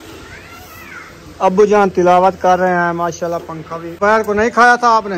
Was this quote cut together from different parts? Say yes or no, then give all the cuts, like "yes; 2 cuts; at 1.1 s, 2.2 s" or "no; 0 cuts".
yes; 1 cut; at 3.9 s